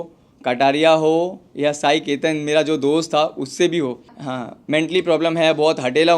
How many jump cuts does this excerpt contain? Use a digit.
1